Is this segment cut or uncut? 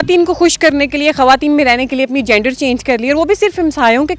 uncut